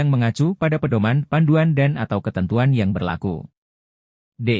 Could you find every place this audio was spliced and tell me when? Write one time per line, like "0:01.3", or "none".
0:03.6